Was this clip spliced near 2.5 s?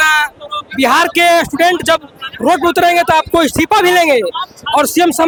no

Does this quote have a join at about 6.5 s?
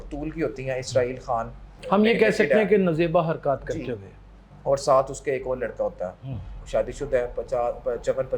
yes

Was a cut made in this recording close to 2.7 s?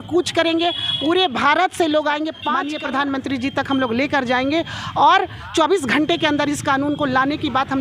yes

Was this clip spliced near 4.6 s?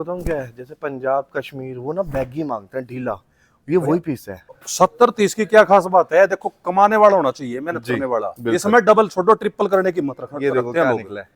yes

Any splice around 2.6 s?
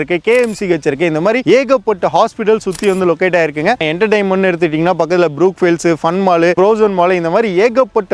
no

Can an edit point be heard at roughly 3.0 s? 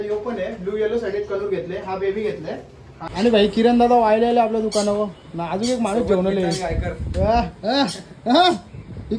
yes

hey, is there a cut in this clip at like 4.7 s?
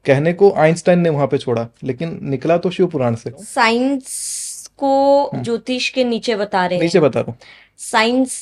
no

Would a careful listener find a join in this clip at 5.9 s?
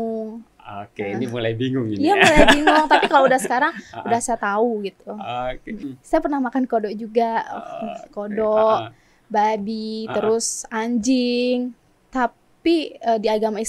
yes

